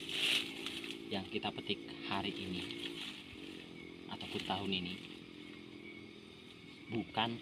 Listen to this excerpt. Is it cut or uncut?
uncut